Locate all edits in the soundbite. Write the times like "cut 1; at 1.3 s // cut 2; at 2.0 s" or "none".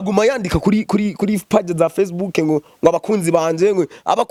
none